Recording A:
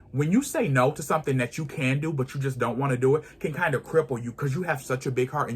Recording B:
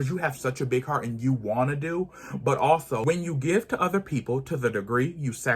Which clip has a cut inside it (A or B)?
B